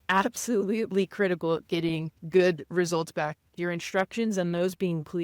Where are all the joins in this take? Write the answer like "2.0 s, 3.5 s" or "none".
2.1 s, 3.5 s